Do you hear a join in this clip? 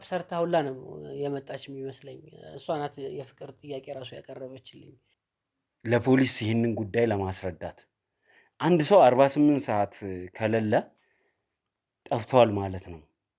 yes; 1 cut; at 5.0 s

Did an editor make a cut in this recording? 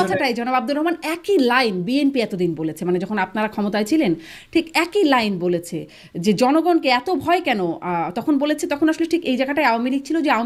no; 0 cuts

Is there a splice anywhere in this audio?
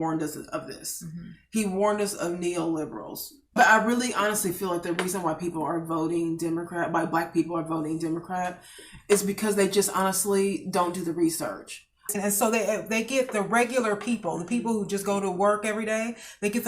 yes; 2 cuts; at 3.6 s, 12.2 s

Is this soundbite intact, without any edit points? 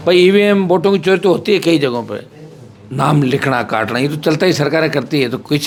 yes; 0 cuts

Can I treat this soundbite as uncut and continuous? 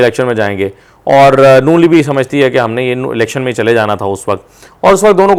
yes; 0 cuts

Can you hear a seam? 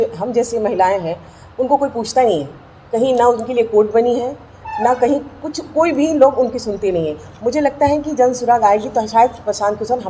no; 0 cuts

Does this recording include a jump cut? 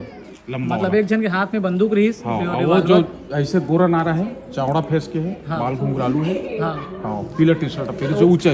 no; 0 cuts

